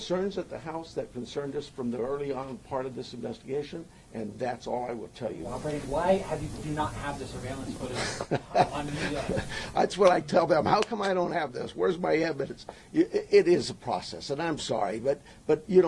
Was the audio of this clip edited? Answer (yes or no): yes